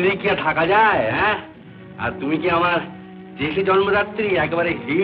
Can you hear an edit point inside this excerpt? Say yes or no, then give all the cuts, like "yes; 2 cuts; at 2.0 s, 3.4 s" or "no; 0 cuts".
no; 0 cuts